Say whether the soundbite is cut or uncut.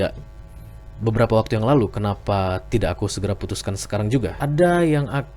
cut